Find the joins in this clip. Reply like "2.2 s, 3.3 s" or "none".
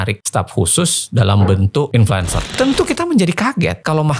2.4 s